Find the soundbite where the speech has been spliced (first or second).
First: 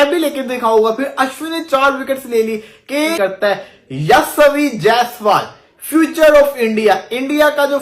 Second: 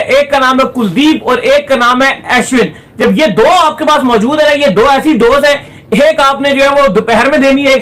first